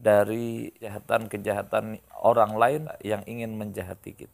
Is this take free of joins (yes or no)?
no